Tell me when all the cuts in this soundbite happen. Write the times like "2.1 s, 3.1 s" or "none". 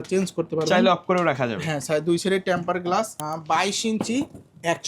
3.3 s